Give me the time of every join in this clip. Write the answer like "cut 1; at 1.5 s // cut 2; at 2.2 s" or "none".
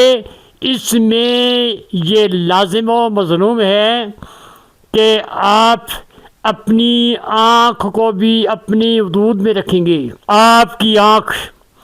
cut 1; at 10.1 s

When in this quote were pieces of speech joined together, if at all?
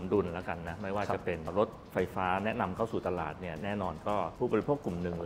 cut 1; at 4.3 s

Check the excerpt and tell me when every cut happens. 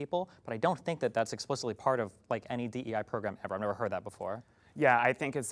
none

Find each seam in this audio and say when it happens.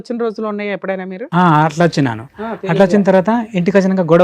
none

